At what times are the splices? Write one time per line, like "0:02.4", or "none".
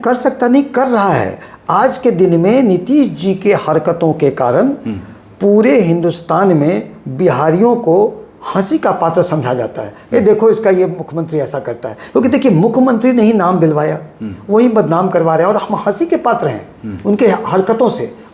none